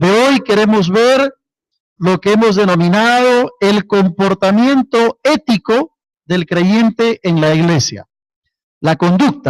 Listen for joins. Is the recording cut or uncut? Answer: uncut